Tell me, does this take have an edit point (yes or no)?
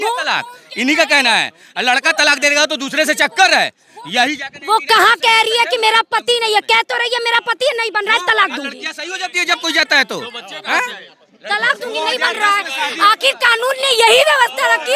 no